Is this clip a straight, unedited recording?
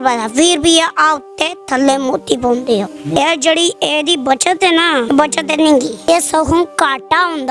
no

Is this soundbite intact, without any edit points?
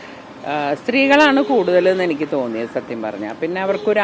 yes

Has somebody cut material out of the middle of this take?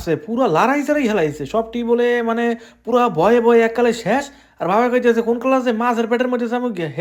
no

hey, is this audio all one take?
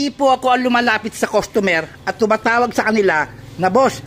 yes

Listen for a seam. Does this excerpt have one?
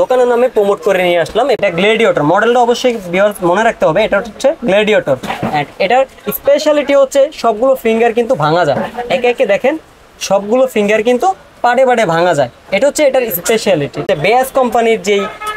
yes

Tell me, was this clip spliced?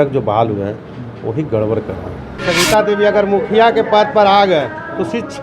yes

